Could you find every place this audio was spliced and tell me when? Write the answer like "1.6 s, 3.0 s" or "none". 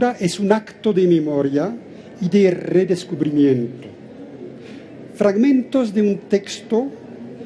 5.3 s